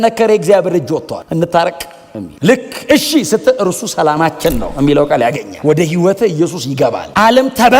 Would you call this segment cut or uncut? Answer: cut